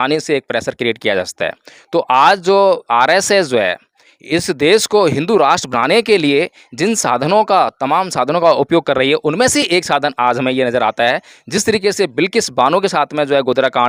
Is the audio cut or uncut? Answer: uncut